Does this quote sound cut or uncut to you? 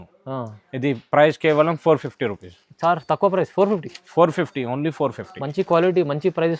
uncut